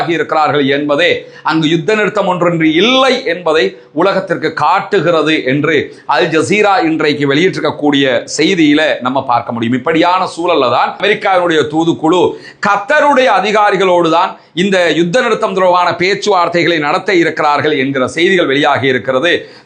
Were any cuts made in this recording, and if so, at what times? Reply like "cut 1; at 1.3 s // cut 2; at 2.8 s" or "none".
cut 1; at 11.0 s